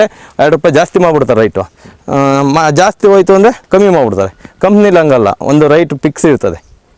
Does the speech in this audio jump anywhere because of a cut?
no; 0 cuts

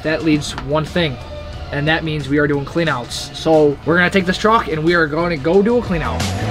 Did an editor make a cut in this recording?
no; 0 cuts

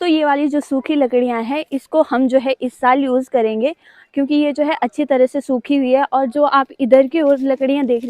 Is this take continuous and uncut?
yes; 0 cuts

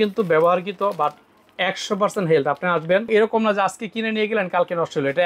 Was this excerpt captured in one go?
no; 1 cut; at 3.1 s

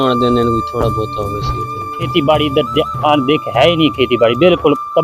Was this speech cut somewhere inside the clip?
yes; 1 cut; at 2.1 s

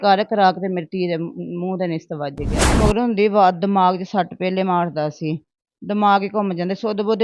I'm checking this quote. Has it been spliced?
yes; 1 cut; at 2.8 s

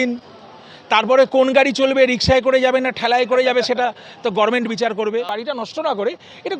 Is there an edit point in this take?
yes; 1 cut; at 5.4 s

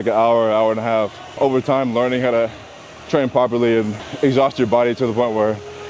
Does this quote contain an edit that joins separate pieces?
yes; 2 cuts; at 1.3 s, 4.1 s

